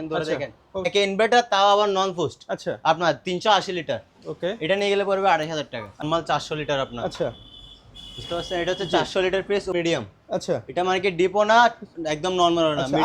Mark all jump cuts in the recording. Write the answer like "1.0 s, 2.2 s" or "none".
0.9 s, 6.1 s, 9.7 s